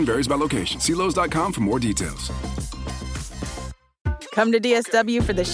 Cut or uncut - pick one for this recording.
cut